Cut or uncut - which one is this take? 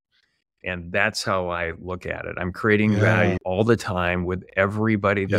cut